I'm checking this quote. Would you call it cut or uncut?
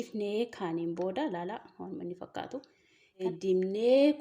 cut